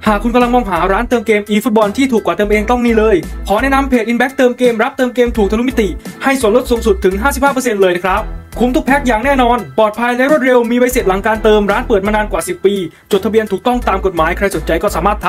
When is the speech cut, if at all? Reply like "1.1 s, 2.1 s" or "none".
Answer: none